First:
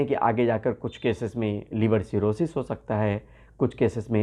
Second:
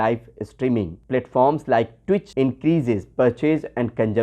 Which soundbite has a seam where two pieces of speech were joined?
second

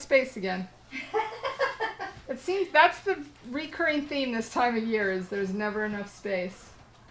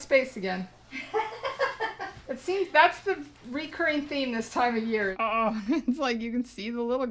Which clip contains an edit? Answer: second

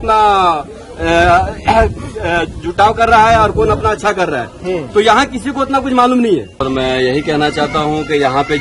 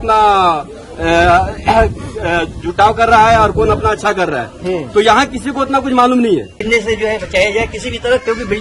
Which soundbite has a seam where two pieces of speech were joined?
second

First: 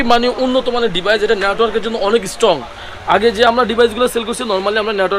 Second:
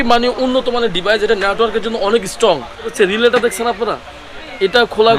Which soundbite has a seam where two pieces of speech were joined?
second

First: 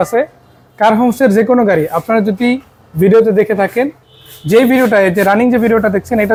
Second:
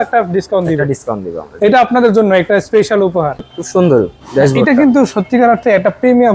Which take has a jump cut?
second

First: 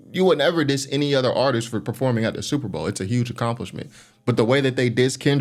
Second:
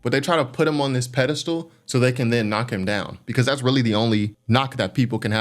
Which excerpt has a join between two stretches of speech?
second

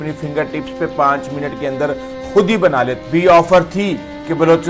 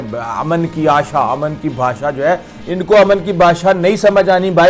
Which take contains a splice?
first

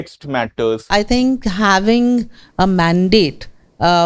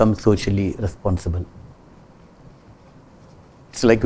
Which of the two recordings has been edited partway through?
first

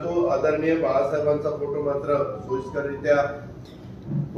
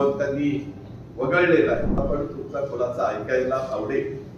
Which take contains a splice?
second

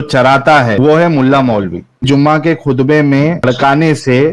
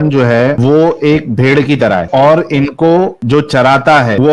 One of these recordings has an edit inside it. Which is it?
first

